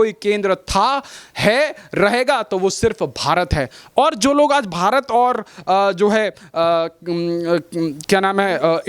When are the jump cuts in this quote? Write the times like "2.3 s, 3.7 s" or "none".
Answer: none